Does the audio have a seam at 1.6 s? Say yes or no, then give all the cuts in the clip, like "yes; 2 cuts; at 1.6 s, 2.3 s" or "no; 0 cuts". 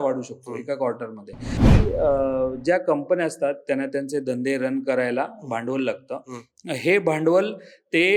yes; 1 cut; at 1.6 s